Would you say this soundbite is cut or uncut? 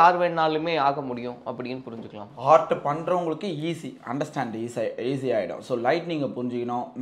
uncut